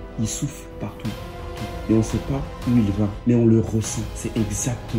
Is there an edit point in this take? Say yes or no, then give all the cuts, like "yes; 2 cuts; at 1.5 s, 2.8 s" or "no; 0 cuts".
no; 0 cuts